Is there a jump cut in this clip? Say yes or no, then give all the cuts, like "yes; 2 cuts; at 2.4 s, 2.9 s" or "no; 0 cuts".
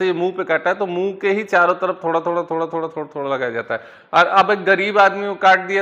no; 0 cuts